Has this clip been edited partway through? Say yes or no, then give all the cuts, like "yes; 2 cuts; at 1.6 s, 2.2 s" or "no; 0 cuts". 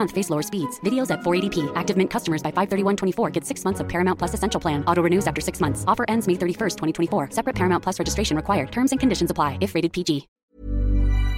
yes; 1 cut; at 10.3 s